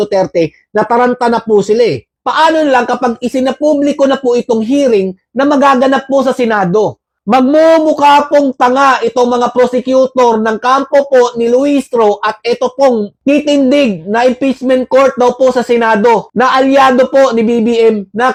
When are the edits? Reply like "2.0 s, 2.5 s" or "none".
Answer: none